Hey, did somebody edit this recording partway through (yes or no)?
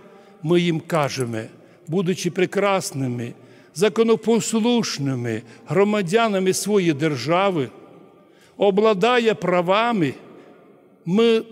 no